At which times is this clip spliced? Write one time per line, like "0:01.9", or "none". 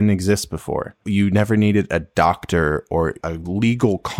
0:01.0
0:03.3